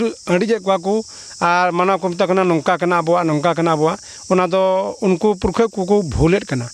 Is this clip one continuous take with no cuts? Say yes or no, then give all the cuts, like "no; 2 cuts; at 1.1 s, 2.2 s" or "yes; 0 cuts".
yes; 0 cuts